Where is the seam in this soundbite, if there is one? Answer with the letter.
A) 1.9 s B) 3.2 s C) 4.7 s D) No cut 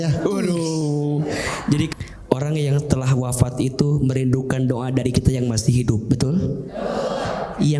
A